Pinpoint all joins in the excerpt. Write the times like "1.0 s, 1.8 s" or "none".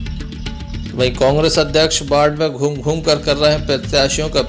none